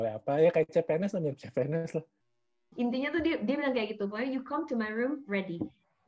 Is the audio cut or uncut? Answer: cut